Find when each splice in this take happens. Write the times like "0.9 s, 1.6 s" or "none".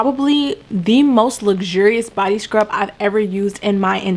none